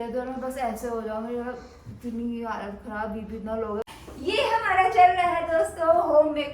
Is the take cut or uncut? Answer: cut